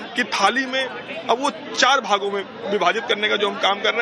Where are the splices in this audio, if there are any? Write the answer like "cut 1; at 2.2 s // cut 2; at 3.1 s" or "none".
cut 1; at 1.6 s